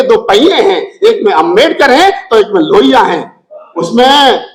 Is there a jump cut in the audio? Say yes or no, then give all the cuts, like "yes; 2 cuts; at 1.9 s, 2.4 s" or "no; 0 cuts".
no; 0 cuts